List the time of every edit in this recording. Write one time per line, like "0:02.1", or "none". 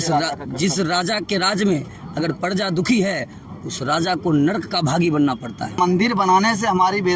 0:05.8